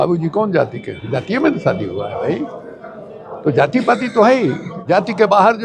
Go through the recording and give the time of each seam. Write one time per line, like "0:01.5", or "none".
0:04.7